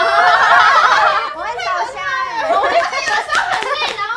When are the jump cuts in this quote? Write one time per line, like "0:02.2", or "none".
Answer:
0:01.3
0:02.8